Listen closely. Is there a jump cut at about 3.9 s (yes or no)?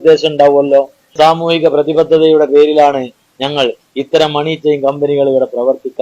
no